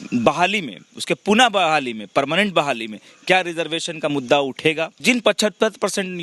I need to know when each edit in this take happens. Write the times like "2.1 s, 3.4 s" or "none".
5.0 s